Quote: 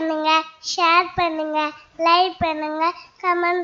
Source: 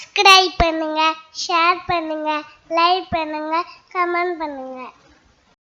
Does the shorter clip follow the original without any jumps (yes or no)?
yes